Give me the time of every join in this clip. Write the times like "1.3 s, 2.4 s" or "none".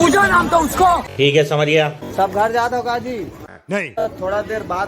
1.0 s, 4.0 s